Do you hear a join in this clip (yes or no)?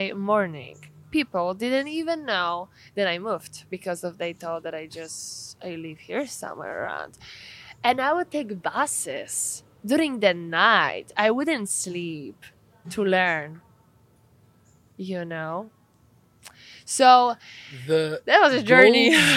no